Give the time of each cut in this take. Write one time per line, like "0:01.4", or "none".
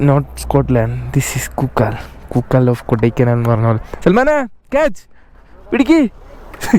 none